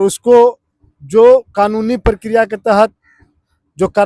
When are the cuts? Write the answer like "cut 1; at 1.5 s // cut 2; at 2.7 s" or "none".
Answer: none